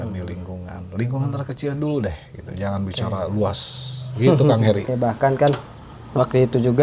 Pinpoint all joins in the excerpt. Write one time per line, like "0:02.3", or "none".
0:04.9

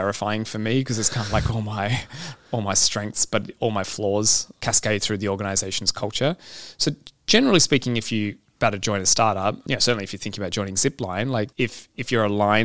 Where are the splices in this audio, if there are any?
0:04.5
0:08.5
0:09.6
0:11.5

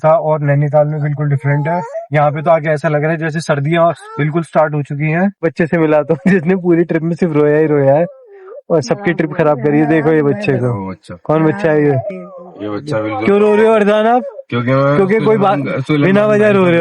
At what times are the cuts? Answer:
0:01.9
0:05.4
0:12.2

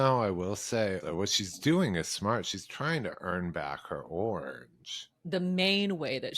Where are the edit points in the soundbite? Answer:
0:01.0
0:05.1

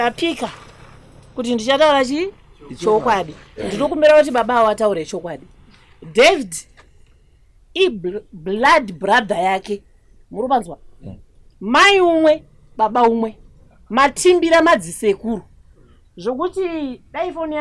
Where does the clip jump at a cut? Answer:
none

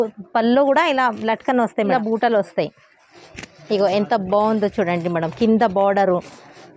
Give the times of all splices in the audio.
0:01.9

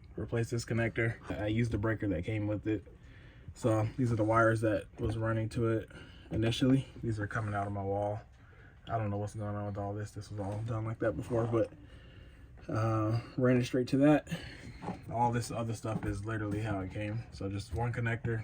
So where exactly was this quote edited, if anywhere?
0:01.2

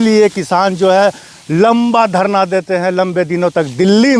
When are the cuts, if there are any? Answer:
none

